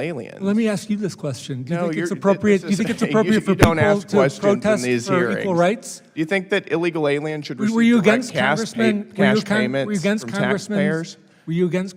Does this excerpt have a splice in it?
no; 0 cuts

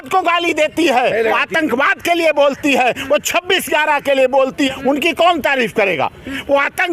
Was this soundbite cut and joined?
yes; 1 cut; at 4.7 s

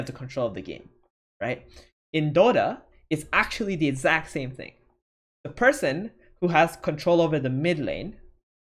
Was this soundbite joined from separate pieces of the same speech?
no; 0 cuts

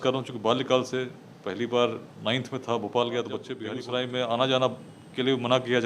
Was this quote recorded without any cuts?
no; 1 cut; at 3.6 s

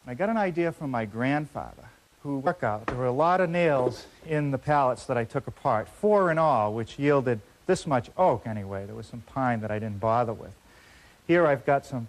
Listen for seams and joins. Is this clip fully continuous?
yes; 0 cuts

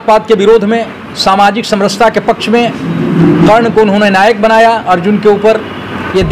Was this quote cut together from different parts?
no; 0 cuts

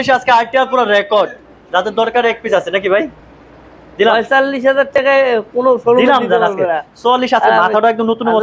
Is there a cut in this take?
no; 0 cuts

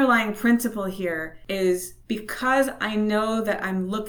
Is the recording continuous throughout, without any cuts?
no; 2 cuts; at 1.3 s, 1.9 s

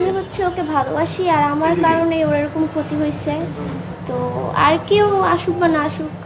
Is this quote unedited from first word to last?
yes; 0 cuts

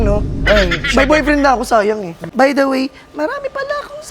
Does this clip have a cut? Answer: yes; 1 cut; at 2.2 s

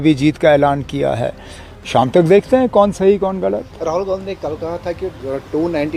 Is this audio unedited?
yes; 0 cuts

